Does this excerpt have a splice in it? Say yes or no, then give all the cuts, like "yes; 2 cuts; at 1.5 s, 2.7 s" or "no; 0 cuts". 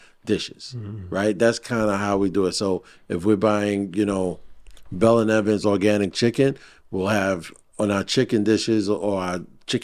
no; 0 cuts